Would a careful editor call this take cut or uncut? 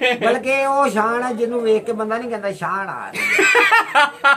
uncut